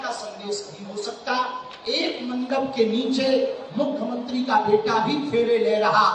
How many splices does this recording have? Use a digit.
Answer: 0